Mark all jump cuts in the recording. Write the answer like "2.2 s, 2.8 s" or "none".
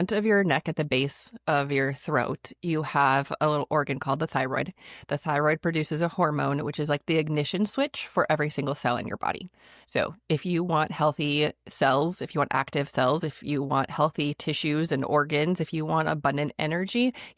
none